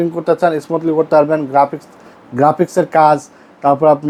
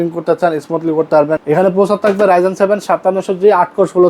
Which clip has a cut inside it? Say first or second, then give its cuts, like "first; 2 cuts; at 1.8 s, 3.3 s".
second; 1 cut; at 1.4 s